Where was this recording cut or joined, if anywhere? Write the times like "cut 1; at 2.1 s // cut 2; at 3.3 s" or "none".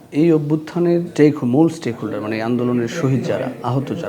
cut 1; at 1.1 s